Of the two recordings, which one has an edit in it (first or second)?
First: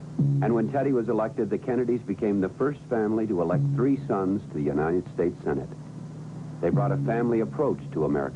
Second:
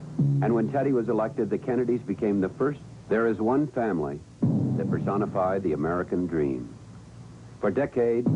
first